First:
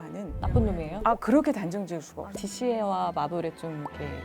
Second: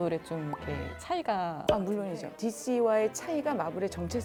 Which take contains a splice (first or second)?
first